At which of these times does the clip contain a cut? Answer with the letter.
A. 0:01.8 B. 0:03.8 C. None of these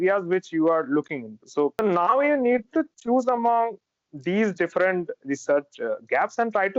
A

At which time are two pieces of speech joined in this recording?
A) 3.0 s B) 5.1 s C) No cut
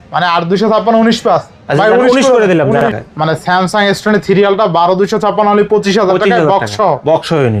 A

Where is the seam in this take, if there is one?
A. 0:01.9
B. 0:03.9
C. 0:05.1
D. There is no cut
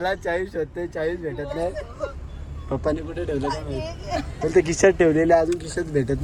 D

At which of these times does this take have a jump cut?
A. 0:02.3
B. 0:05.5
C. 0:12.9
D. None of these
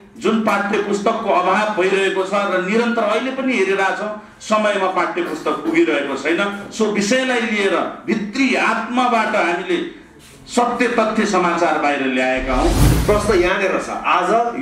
C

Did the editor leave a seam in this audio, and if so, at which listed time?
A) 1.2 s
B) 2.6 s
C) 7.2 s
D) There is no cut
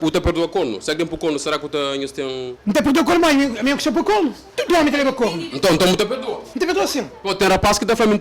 D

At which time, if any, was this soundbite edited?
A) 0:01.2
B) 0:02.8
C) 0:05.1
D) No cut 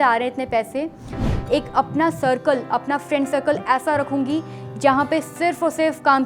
A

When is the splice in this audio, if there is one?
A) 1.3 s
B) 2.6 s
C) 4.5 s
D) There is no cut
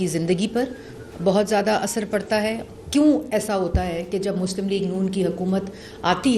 B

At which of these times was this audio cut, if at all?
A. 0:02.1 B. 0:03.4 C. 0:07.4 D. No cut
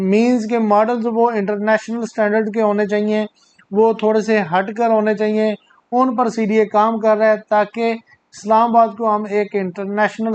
D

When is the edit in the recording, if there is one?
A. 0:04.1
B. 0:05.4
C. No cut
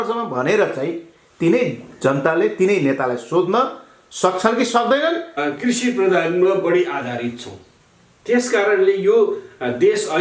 B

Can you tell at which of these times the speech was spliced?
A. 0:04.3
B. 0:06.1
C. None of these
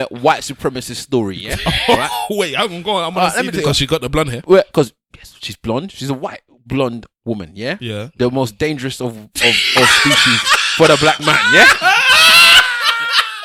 C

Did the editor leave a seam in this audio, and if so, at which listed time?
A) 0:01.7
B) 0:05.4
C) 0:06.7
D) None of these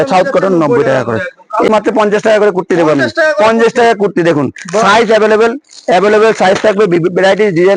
A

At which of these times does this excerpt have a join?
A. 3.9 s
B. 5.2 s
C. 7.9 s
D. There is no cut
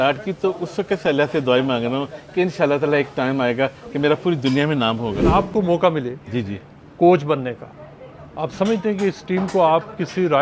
B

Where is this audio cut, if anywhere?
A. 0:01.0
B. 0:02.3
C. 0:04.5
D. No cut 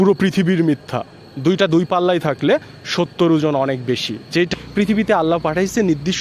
C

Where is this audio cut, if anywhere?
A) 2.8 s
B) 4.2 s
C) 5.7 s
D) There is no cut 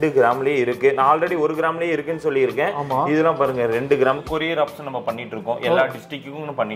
B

